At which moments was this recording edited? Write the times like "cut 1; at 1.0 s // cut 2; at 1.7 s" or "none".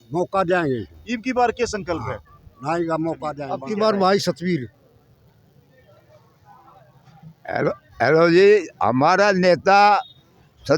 cut 1; at 3.4 s